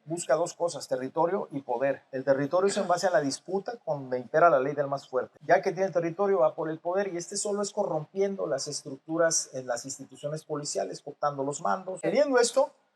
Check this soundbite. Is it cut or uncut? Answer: cut